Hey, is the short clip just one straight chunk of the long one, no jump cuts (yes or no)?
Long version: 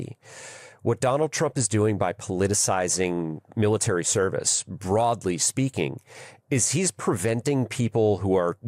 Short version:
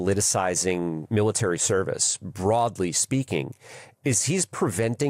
no